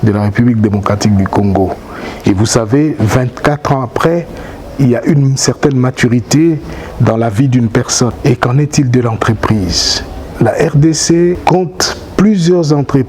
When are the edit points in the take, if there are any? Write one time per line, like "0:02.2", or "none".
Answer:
0:08.2
0:11.4